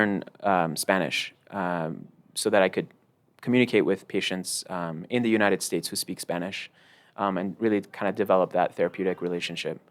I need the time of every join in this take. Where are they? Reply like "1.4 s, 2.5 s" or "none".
none